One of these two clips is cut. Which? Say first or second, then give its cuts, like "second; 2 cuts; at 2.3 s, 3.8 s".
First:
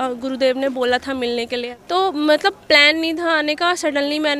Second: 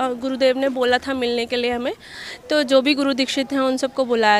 first; 1 cut; at 1.6 s